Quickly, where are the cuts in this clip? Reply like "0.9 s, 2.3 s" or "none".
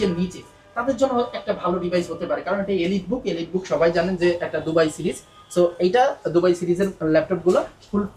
none